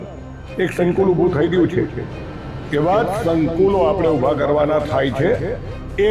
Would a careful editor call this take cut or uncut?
uncut